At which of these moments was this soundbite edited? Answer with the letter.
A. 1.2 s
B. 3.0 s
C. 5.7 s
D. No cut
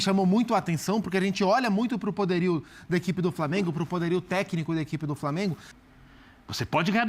C